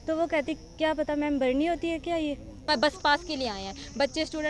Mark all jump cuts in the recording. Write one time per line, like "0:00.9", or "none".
0:02.7